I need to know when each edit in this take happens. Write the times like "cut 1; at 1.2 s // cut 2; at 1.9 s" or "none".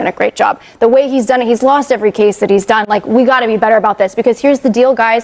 none